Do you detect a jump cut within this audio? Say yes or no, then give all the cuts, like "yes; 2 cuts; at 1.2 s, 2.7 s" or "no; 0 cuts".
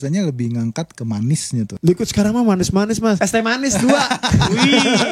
yes; 2 cuts; at 1.7 s, 3.2 s